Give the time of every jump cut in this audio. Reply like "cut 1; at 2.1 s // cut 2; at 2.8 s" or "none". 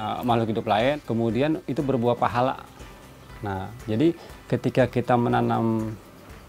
cut 1; at 1.0 s